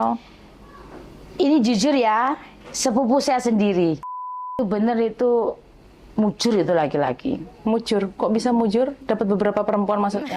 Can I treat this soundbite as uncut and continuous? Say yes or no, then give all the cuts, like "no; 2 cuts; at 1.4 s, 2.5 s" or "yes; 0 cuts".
no; 1 cut; at 4.1 s